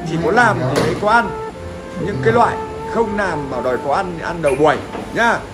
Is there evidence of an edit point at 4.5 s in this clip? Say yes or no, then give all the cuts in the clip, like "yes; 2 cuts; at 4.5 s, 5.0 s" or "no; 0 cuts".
no; 0 cuts